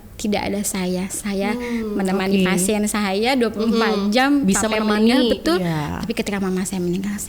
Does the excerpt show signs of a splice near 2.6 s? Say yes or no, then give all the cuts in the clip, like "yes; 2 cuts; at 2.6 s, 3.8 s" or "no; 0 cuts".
no; 0 cuts